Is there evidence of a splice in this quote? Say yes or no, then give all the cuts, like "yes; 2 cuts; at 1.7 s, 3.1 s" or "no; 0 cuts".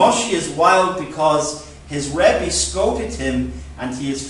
yes; 1 cut; at 1.4 s